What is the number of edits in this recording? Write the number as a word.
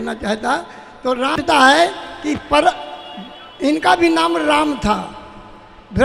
one